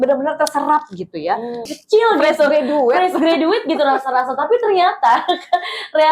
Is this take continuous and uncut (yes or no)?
no